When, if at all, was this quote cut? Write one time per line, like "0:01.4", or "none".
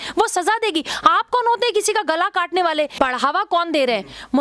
0:02.9